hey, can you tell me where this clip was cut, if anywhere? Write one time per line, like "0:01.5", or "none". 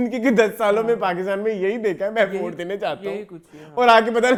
none